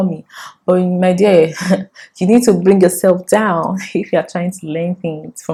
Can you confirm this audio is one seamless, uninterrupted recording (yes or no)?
yes